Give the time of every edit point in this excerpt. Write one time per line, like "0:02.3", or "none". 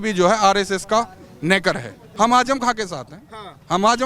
0:02.0